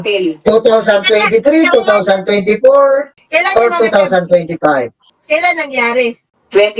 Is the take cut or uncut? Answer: uncut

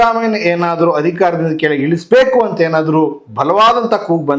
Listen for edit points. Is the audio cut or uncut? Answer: uncut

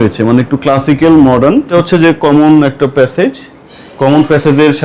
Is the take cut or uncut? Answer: cut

